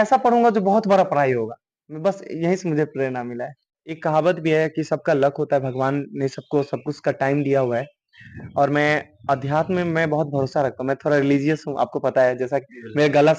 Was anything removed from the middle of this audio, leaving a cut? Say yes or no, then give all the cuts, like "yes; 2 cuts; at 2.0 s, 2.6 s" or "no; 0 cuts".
yes; 1 cut; at 3.8 s